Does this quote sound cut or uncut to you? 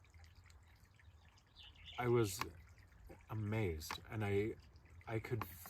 cut